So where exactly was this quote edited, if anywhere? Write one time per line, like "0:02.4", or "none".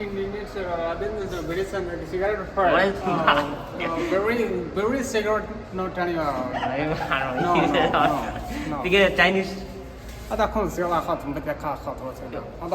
0:03.0
0:06.8